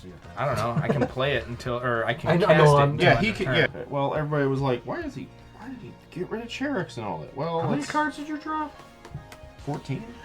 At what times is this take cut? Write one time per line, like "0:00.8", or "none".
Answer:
0:03.7

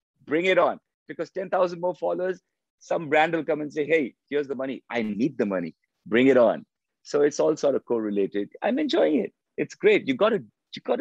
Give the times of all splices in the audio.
none

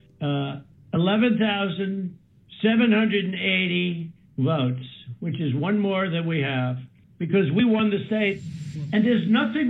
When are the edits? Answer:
none

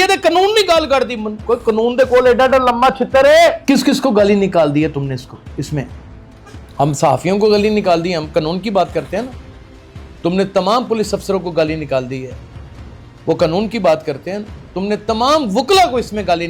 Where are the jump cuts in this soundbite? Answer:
0:03.6

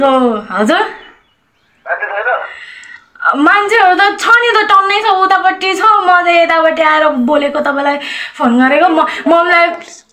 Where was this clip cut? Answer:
none

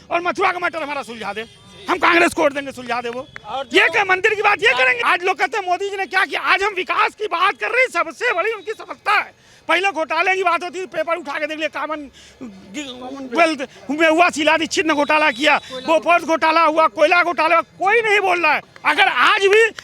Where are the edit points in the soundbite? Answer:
0:05.0
0:18.7

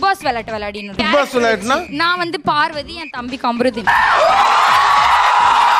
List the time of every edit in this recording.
0:01.0

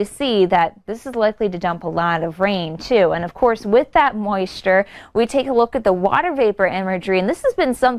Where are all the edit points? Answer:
0:06.8

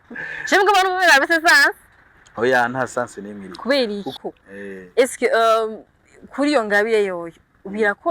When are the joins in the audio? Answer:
0:04.2

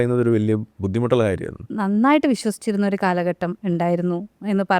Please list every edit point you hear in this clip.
0:01.7

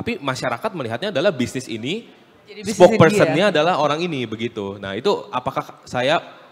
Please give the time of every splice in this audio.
none

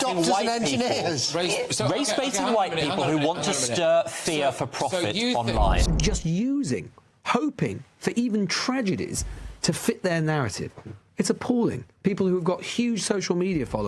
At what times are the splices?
0:05.8

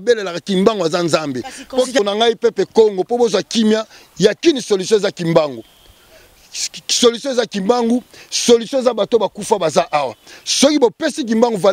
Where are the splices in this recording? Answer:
0:02.0

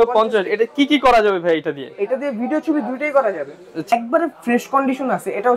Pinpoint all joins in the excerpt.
0:03.9

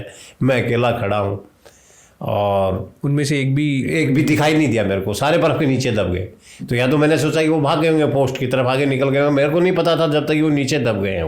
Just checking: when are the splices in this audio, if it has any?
none

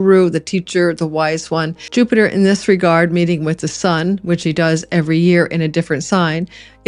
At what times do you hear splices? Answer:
0:01.9

